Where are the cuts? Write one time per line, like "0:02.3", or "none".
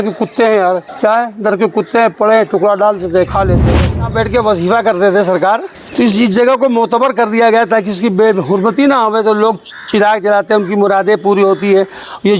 0:00.9
0:03.7
0:05.8